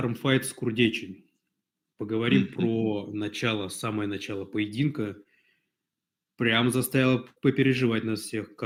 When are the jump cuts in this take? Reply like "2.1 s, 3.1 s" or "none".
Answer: none